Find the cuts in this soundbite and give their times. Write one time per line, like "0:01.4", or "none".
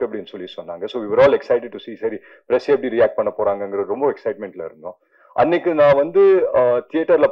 none